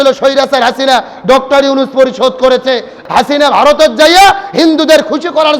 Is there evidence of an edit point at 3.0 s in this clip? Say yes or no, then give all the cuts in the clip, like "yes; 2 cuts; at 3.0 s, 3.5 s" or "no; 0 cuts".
yes; 1 cut; at 3.0 s